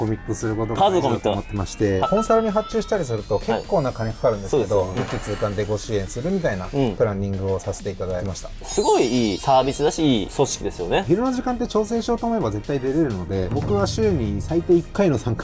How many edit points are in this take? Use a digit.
4